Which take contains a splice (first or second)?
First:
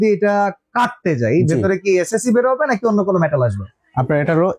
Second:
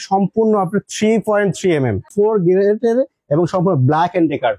second